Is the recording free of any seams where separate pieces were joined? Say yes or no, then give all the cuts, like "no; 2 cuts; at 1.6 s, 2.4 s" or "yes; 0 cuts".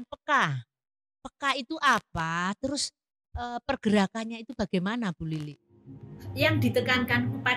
no; 1 cut; at 6.1 s